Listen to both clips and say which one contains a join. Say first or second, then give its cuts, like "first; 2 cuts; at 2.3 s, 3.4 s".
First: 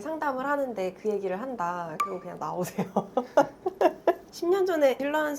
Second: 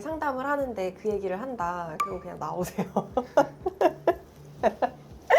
first; 1 cut; at 4.3 s